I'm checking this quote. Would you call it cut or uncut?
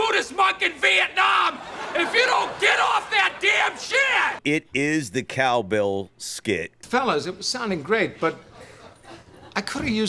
cut